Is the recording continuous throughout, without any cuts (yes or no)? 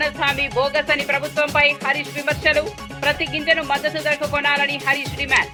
yes